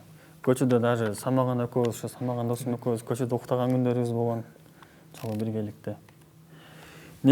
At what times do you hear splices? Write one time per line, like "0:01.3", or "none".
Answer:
none